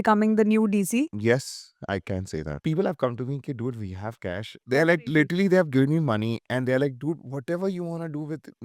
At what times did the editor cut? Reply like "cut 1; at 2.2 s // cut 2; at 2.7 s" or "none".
cut 1; at 1.1 s // cut 2; at 2.6 s // cut 3; at 4.6 s